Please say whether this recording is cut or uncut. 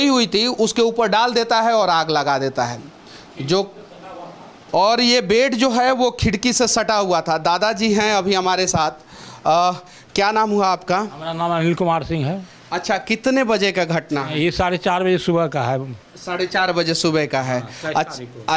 uncut